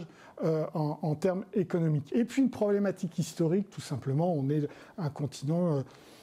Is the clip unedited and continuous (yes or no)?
no